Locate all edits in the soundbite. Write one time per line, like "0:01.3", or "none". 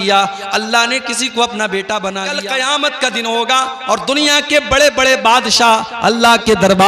0:02.3

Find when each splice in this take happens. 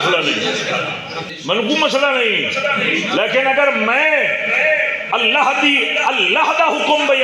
0:01.3

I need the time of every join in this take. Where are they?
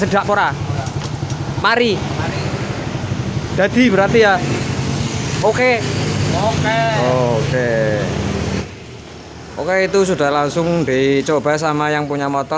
0:08.7

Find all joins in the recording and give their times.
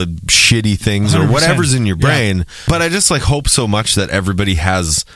0:02.6

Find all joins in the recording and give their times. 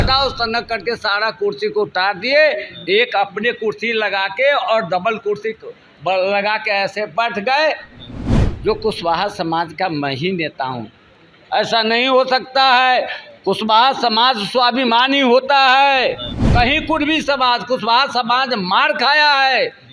0:16.4

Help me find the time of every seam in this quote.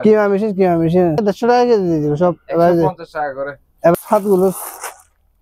0:01.2
0:03.9

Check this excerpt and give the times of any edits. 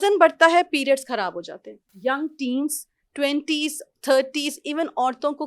0:01.9

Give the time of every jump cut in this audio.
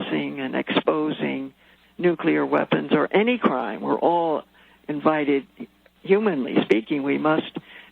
none

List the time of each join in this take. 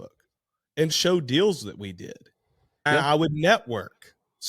0:00.9
0:02.9

